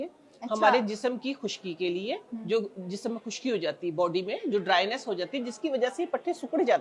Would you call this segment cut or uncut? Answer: uncut